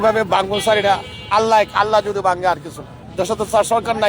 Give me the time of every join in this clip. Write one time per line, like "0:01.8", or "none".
0:03.0